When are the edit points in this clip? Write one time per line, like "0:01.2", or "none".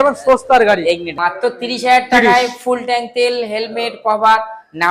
0:01.1